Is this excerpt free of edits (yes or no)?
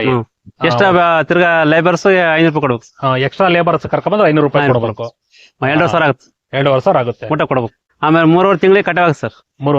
no